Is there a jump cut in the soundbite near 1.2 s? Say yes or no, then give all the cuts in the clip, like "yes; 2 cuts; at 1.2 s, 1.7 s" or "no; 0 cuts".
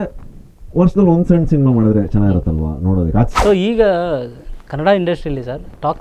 no; 1 cut; at 3.3 s